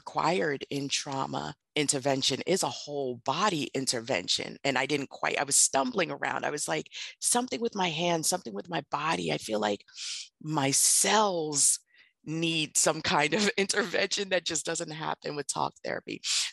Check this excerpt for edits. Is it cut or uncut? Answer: cut